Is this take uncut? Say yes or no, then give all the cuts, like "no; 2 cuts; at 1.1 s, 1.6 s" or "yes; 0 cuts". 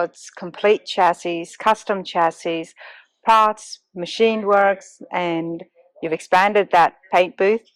yes; 0 cuts